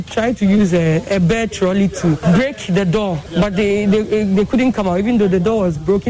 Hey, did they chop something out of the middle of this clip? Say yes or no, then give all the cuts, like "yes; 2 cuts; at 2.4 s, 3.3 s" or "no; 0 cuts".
yes; 2 cuts; at 2.2 s, 3.3 s